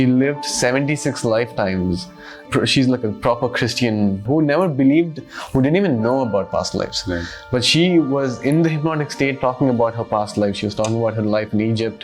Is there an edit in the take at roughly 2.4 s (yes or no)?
yes